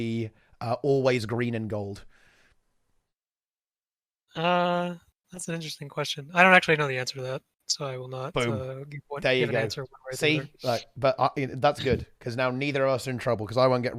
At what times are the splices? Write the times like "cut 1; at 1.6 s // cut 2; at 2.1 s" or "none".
none